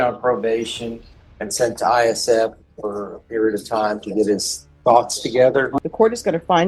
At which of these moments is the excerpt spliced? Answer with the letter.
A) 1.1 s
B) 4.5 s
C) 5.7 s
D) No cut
C